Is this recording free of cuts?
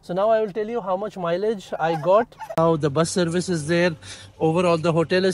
no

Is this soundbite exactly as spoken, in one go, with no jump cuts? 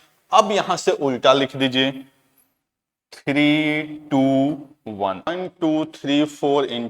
no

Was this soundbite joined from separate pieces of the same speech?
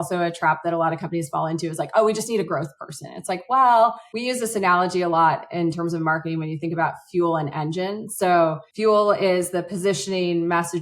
yes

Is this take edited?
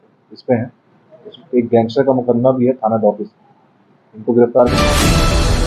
yes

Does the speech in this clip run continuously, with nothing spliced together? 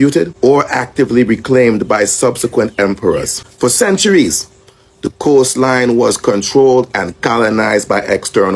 yes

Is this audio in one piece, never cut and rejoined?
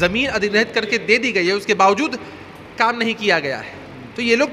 yes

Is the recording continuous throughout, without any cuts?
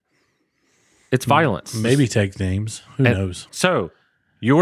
no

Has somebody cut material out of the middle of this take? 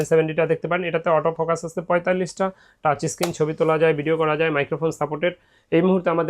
no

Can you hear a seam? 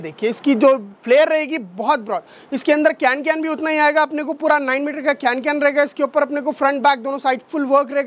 no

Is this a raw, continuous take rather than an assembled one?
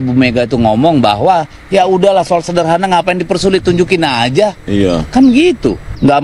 yes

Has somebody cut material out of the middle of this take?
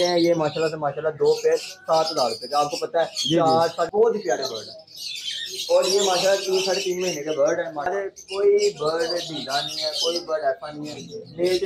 yes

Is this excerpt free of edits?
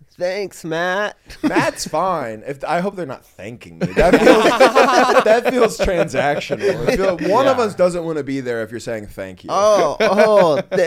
yes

